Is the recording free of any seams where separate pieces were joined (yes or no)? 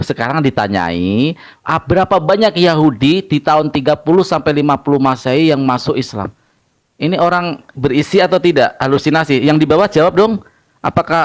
yes